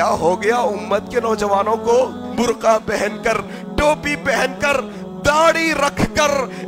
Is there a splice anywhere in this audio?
yes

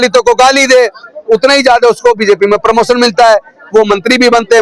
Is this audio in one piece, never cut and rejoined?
yes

